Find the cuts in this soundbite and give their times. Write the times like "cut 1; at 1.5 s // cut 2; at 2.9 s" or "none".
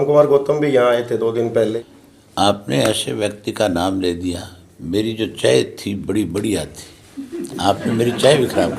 cut 1; at 1.7 s